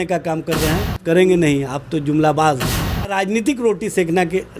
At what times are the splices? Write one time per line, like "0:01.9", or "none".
0:01.0
0:03.2